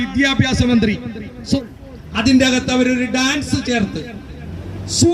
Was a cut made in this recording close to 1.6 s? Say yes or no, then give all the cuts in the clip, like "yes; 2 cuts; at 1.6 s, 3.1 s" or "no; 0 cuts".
yes; 1 cut; at 1.6 s